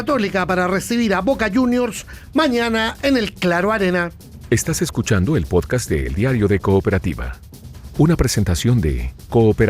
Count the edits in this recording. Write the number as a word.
one